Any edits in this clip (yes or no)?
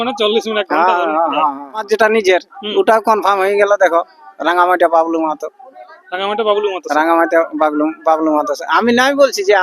yes